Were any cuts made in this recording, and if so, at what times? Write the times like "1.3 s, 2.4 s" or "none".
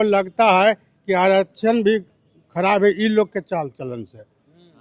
none